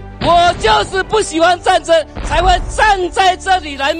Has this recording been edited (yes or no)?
no